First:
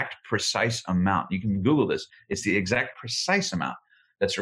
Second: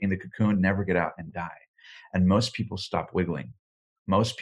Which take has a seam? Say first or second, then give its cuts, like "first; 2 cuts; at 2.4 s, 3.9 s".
first; 2 cuts; at 2.1 s, 3.0 s